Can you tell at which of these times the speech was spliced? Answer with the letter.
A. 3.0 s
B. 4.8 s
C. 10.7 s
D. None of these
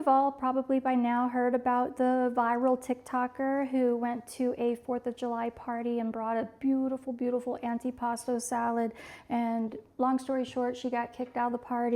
D